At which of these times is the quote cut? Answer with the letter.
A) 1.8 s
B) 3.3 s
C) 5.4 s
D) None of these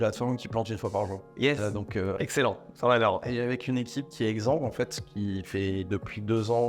B